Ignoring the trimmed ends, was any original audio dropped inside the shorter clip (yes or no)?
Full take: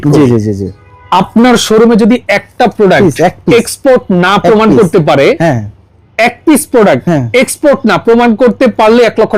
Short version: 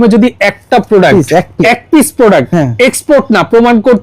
yes